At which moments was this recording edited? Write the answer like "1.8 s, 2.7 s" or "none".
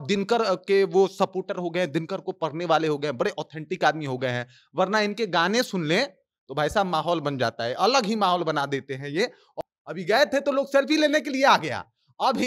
9.5 s